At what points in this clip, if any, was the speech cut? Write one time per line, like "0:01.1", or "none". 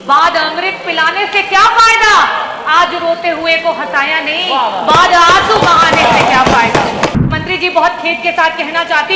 0:07.3